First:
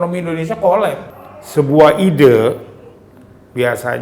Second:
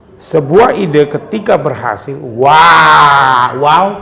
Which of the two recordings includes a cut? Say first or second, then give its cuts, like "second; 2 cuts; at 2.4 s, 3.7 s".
first; 1 cut; at 1.0 s